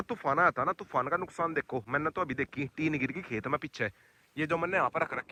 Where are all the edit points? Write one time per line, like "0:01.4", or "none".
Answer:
none